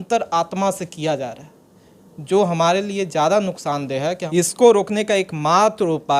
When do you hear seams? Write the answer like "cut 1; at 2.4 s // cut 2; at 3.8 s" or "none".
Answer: cut 1; at 4.2 s